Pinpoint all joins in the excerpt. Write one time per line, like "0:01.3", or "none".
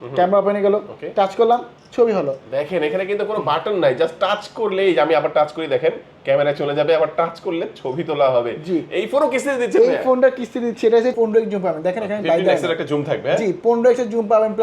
0:11.1

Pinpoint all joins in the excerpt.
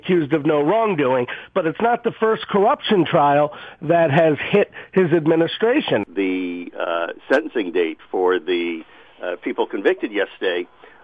0:06.0

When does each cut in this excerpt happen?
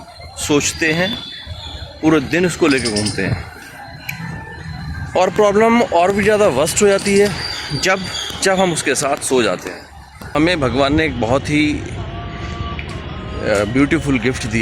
0:10.2

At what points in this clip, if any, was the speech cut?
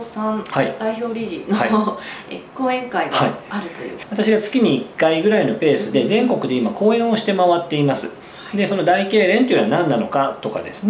0:04.0

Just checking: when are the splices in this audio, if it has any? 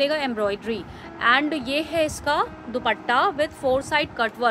none

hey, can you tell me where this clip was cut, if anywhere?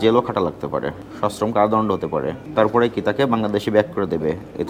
0:01.0
0:02.4

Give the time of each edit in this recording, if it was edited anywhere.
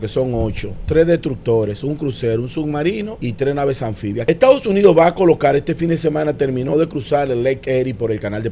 0:03.2
0:04.2

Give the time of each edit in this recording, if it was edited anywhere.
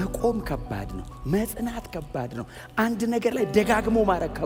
none

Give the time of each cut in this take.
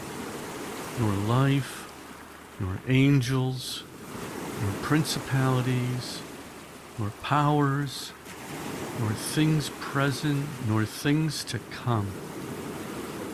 0:07.9
0:09.0

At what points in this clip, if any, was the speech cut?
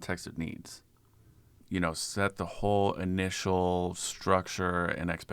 0:01.6

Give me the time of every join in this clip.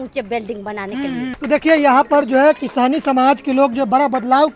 none

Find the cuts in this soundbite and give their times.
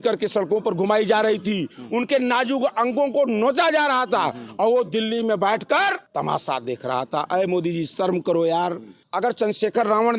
0:06.0
0:09.0

